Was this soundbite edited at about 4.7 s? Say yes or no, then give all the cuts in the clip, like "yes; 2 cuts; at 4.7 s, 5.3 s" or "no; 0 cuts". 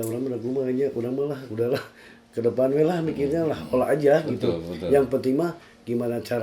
no; 0 cuts